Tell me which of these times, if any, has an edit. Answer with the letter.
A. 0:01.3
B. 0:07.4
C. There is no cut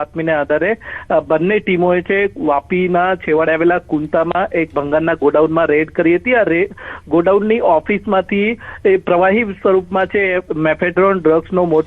B